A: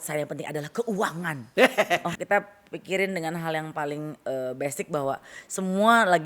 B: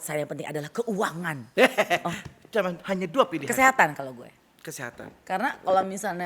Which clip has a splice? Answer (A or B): A